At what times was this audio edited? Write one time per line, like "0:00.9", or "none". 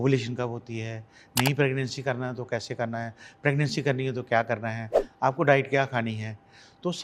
none